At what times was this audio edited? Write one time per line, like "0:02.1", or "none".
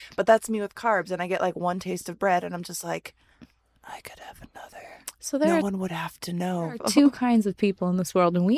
0:06.8